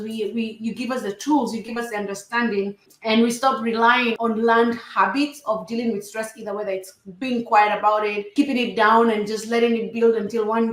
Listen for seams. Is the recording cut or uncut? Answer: cut